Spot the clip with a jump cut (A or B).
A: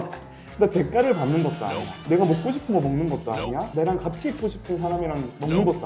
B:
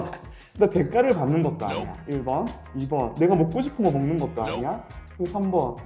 A